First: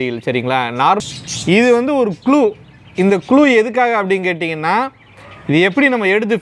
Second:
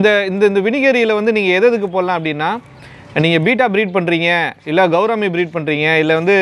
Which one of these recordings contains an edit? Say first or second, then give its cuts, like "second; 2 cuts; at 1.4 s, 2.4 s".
first; 1 cut; at 1.0 s